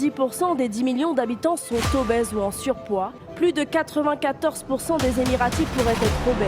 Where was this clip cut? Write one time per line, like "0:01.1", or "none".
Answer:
0:03.2